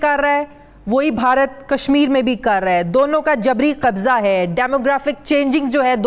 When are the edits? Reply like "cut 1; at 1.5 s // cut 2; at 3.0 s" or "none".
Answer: none